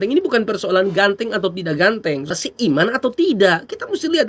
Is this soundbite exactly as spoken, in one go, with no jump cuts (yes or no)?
no